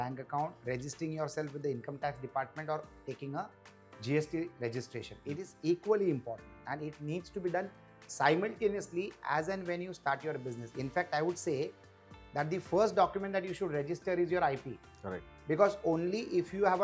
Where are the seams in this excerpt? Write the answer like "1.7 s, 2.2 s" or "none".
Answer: none